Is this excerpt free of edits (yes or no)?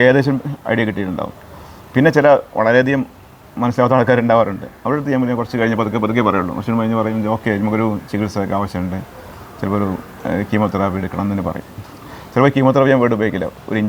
yes